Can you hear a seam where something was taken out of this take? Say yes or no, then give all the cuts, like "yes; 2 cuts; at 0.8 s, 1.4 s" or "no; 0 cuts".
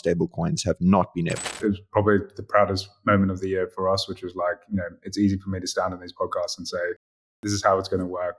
yes; 1 cut; at 1.5 s